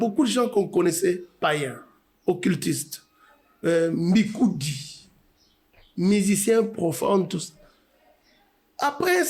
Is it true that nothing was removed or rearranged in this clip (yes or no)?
yes